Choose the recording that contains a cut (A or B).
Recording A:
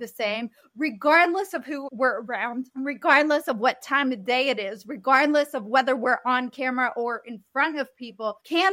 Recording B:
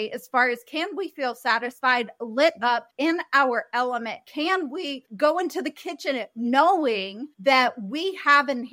B